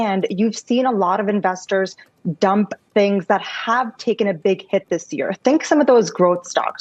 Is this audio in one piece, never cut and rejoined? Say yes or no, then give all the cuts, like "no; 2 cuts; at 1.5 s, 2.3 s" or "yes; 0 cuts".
yes; 0 cuts